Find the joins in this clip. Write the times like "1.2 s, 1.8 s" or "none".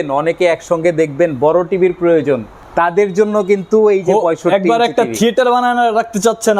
2.6 s